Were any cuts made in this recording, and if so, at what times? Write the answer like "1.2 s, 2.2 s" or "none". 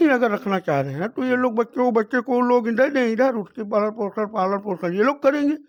none